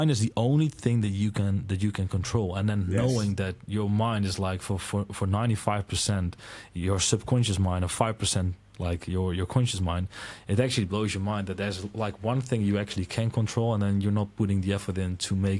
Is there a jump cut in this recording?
no; 0 cuts

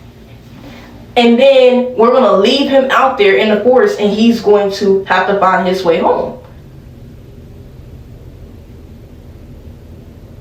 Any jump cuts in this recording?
no; 0 cuts

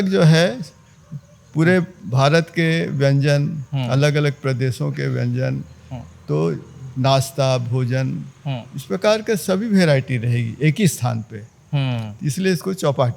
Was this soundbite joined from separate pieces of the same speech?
no; 0 cuts

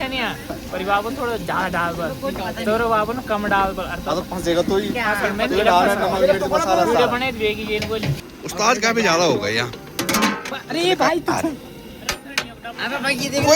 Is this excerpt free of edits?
no; 1 cut; at 8.2 s

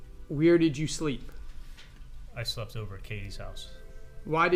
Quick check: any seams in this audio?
no; 0 cuts

